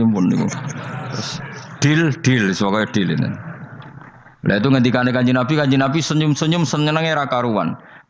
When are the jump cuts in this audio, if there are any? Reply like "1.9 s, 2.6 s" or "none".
none